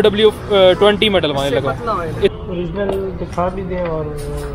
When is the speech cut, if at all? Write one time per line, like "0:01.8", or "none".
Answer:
0:02.3